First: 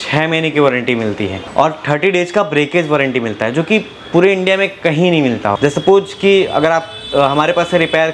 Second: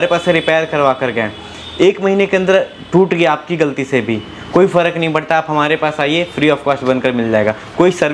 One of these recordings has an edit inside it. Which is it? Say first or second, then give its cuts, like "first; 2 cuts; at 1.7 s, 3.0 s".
first; 2 cuts; at 1.4 s, 5.6 s